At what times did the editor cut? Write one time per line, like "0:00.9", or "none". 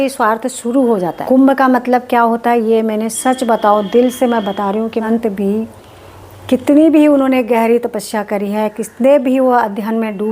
0:01.2
0:05.0